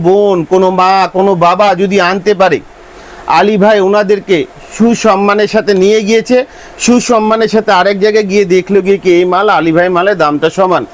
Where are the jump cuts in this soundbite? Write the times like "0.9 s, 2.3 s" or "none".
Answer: none